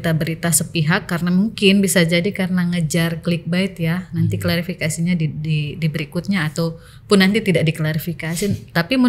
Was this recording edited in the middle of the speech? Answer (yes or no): no